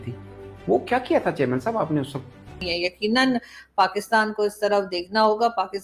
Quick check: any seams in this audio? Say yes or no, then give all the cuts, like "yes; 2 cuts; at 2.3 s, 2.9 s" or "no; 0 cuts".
yes; 1 cut; at 2.7 s